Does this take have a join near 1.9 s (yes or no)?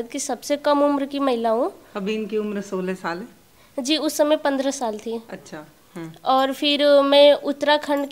no